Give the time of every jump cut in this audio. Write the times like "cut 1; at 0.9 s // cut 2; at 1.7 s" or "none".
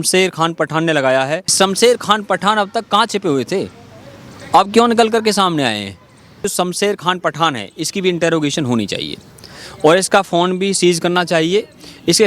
cut 1; at 1.5 s // cut 2; at 6.4 s